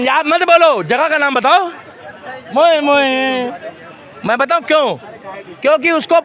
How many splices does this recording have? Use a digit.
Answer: 0